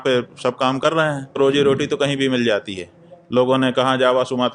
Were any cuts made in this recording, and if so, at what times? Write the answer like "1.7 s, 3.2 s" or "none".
1.4 s